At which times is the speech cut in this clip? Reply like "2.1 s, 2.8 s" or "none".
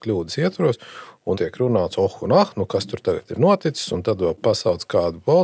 1.4 s, 4.4 s